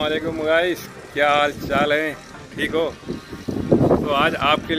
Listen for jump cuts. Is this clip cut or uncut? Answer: uncut